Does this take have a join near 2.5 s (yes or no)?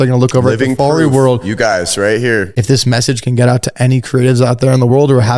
yes